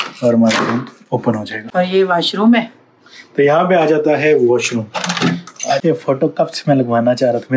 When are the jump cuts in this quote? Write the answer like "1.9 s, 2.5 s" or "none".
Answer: 1.5 s, 5.8 s